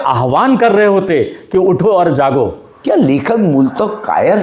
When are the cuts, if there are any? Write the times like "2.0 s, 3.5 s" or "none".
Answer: 2.7 s